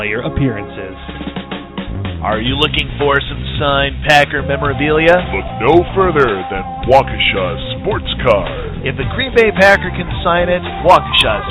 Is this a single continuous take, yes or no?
no